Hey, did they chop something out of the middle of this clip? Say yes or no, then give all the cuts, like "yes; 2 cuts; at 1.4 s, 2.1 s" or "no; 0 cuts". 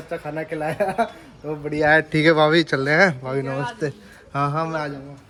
no; 0 cuts